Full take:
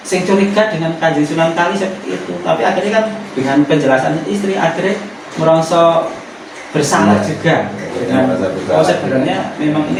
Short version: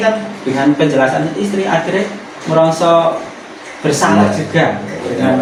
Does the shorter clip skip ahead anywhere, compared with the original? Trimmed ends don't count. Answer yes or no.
no